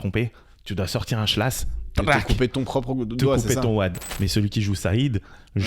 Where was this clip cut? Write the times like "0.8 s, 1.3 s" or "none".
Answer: 4.0 s